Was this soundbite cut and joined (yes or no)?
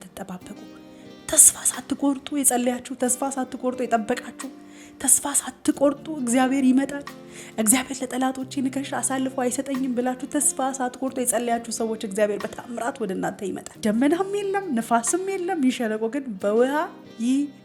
yes